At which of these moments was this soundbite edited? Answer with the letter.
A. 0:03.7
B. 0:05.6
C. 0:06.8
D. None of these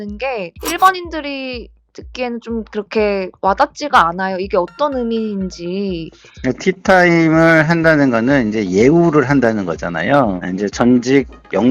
D